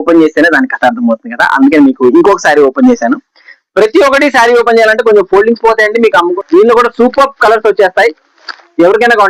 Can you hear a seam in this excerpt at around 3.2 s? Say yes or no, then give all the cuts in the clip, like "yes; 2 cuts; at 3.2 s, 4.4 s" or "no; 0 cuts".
no; 1 cut; at 6.3 s